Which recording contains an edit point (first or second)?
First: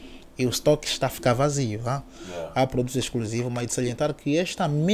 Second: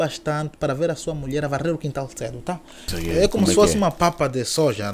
second